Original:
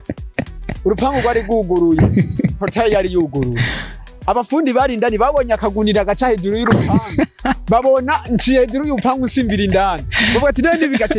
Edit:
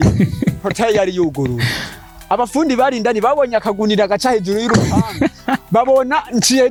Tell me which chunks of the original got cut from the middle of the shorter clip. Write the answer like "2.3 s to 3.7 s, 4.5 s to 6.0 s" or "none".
none